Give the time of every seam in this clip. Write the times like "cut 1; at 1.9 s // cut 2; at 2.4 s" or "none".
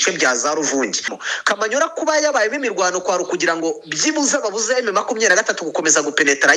cut 1; at 1.2 s